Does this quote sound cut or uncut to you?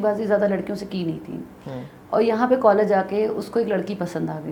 uncut